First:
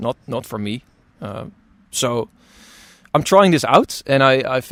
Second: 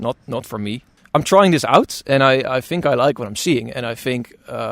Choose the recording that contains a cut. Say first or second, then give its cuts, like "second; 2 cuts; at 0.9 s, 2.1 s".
second; 1 cut; at 0.9 s